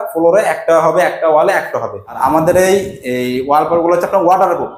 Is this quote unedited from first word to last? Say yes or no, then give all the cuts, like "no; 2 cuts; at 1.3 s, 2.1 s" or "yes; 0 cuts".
no; 1 cut; at 2.2 s